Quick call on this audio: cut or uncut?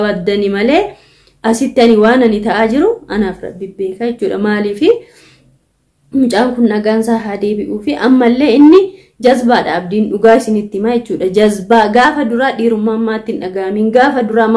uncut